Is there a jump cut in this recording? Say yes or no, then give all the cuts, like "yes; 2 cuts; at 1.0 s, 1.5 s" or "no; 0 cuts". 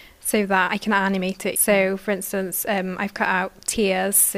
no; 0 cuts